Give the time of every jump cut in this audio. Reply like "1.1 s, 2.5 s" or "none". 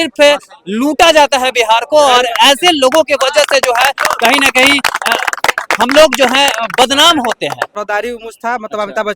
7.7 s